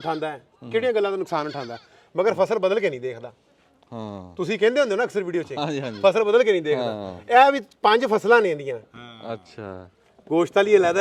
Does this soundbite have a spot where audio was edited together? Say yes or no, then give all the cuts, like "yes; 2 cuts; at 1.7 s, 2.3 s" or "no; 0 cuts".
no; 0 cuts